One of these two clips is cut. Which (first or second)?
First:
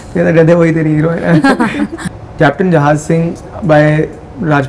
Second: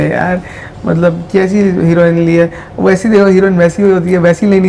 first